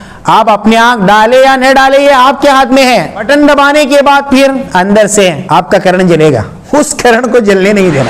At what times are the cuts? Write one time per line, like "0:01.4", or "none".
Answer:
0:03.2
0:04.6
0:05.4
0:06.5